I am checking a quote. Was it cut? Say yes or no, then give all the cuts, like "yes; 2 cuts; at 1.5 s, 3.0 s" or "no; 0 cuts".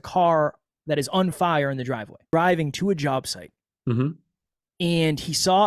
yes; 1 cut; at 2.3 s